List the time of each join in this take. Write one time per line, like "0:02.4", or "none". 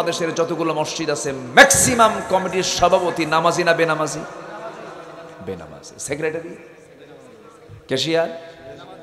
none